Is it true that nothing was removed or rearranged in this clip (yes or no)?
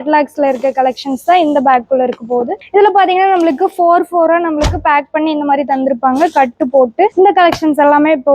no